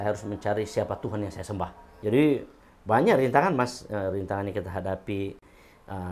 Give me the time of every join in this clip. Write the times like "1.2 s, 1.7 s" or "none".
1.9 s